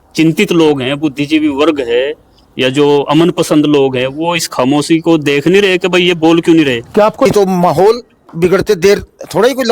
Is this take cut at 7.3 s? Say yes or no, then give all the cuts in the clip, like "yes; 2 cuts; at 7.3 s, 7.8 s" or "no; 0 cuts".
yes; 1 cut; at 7.3 s